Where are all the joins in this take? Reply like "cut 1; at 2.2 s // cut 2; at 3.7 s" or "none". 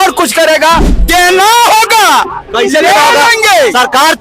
cut 1; at 0.9 s